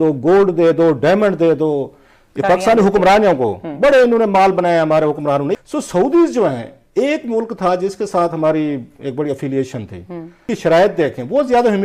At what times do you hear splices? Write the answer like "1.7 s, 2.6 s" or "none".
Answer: 5.6 s, 10.5 s